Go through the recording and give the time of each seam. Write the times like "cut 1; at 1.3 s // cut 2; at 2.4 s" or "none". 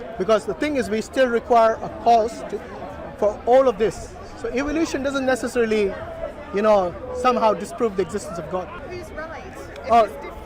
cut 1; at 8.9 s